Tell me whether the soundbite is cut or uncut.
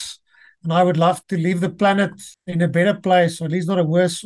cut